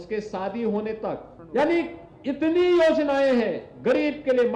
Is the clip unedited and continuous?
no; 1 cut; at 1.3 s

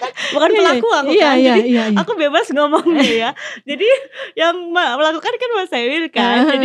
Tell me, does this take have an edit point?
no; 0 cuts

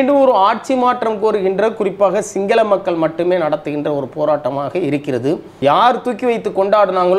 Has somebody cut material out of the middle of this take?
yes; 1 cut; at 5.5 s

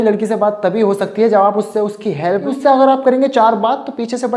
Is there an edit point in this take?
yes; 1 cut; at 2.5 s

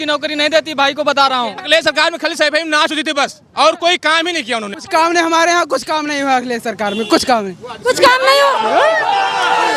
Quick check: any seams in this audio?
yes; 2 cuts; at 1.6 s, 4.8 s

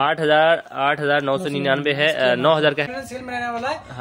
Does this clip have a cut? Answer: yes; 1 cut; at 2.8 s

